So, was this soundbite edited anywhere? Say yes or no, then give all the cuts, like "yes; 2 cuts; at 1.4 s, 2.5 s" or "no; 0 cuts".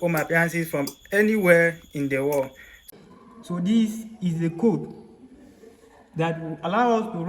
yes; 1 cut; at 2.9 s